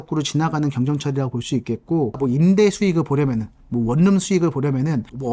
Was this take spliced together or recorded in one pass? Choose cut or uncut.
cut